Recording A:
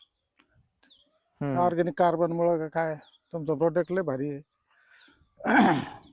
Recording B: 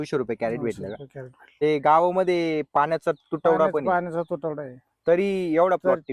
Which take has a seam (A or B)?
B